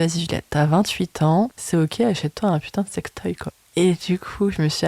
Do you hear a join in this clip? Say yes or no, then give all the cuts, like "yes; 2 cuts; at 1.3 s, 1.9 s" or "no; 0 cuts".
yes; 2 cuts; at 1.6 s, 3.5 s